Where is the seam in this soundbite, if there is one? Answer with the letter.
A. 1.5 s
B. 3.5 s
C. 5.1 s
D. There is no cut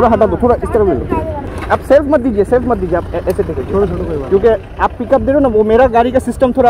A